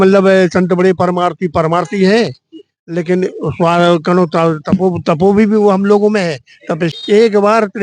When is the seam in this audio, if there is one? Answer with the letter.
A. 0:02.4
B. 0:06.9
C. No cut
B